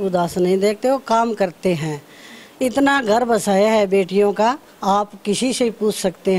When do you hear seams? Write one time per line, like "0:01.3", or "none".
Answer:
none